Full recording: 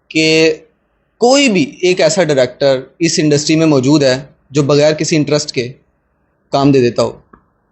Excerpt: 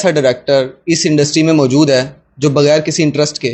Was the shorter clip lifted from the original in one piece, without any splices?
yes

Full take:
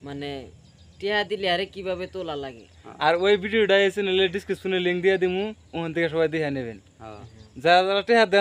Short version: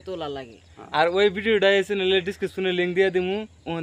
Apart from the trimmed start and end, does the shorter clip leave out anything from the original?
no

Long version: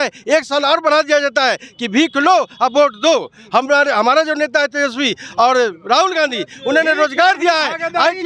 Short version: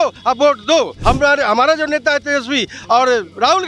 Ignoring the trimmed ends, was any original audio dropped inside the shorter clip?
yes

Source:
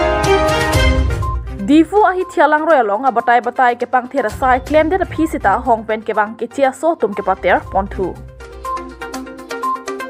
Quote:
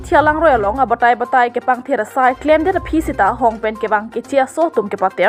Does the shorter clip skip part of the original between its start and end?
no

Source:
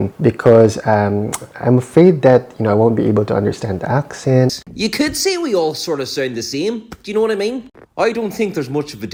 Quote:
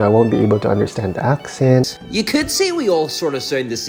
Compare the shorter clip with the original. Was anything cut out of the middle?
no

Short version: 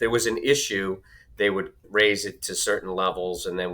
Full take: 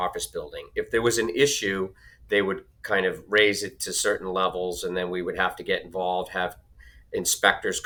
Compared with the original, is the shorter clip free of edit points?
no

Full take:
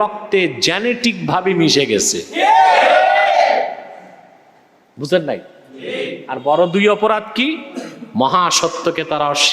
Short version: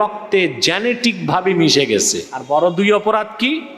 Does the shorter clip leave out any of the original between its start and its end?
yes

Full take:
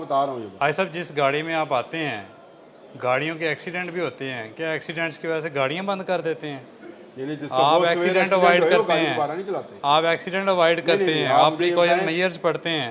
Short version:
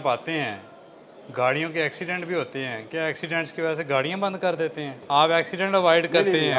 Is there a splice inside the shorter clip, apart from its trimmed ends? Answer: yes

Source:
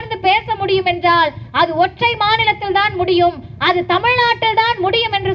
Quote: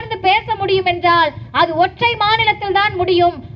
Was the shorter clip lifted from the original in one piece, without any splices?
yes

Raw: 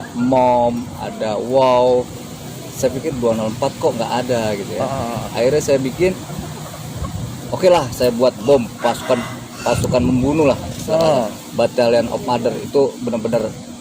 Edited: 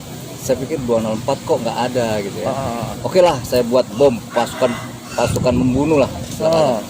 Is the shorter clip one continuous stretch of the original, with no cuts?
no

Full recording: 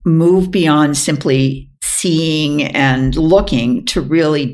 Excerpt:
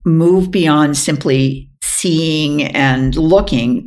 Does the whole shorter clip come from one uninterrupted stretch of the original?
yes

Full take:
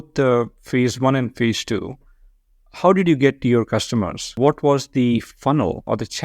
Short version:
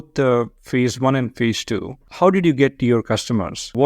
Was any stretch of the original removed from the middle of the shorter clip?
yes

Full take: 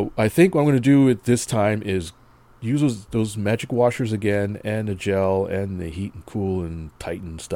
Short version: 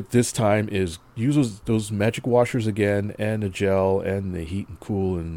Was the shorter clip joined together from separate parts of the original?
yes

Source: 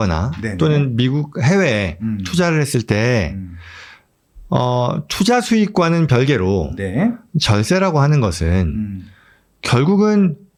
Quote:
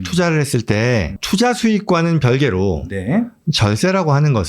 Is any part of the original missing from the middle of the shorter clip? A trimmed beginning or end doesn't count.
yes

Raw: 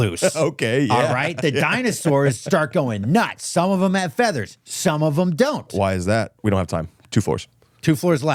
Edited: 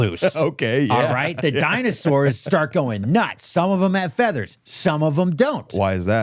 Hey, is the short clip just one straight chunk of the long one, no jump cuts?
yes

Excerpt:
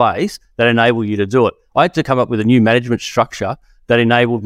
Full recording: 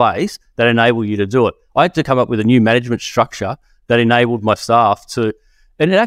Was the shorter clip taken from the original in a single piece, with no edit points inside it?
yes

